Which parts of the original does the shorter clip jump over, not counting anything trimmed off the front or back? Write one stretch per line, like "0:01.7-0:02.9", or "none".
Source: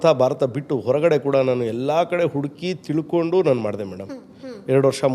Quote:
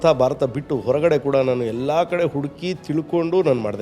none